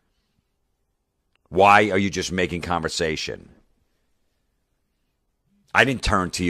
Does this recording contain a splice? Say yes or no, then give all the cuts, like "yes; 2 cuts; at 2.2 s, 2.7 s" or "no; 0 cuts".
yes; 1 cut; at 2.5 s